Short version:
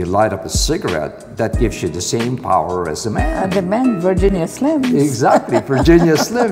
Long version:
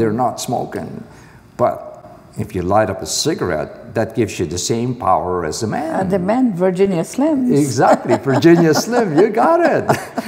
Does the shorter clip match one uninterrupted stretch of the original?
yes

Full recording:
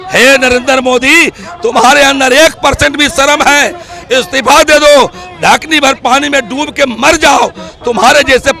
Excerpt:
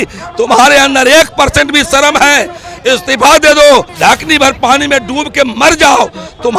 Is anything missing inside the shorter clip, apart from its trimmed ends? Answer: yes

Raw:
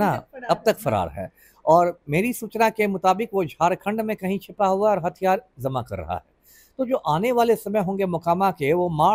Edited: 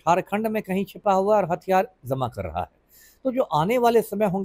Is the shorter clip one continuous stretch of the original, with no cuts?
yes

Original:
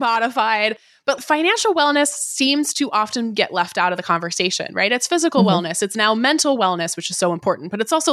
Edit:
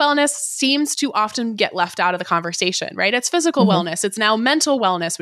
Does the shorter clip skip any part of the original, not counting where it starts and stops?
no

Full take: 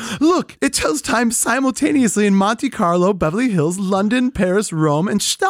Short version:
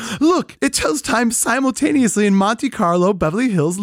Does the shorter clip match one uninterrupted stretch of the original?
yes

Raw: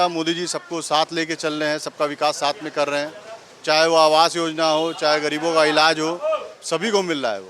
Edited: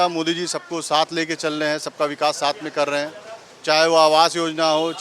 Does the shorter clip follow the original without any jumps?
yes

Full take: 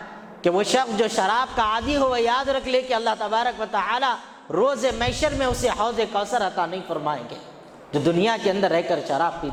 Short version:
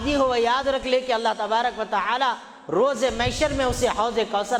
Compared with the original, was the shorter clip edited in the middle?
no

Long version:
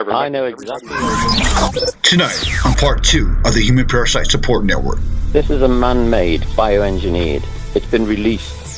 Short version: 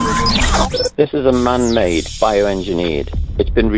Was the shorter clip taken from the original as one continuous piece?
no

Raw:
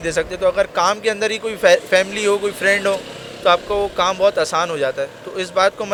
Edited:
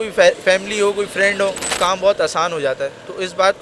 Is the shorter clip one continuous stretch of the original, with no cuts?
no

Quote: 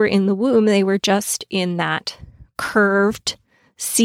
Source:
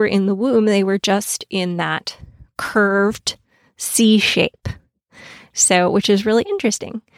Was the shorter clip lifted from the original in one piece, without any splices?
yes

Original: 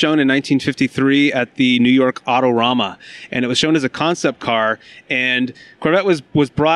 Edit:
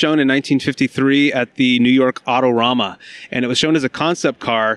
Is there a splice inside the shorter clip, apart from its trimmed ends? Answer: no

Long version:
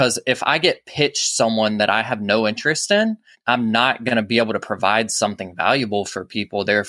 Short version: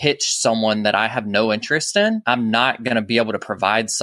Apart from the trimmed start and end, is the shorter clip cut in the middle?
yes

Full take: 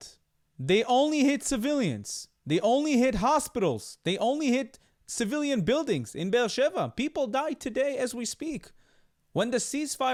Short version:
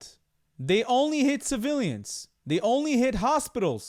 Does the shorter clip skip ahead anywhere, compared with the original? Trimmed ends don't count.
no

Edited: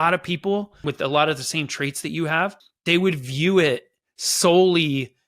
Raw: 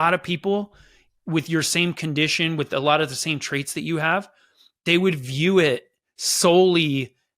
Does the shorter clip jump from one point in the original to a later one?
yes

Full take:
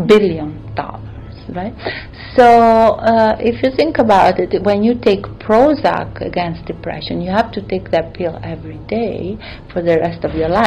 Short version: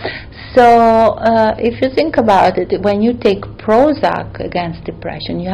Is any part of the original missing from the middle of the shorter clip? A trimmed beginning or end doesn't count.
no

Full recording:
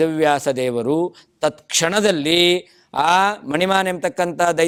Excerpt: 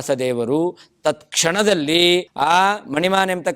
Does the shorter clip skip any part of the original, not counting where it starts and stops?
yes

